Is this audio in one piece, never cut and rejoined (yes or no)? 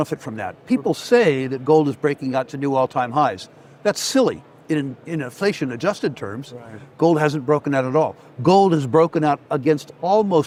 yes